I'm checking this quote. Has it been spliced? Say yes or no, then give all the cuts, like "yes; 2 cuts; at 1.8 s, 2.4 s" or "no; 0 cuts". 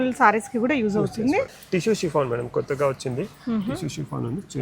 yes; 1 cut; at 1.6 s